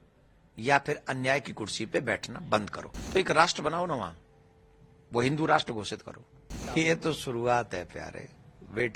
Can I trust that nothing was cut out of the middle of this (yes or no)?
no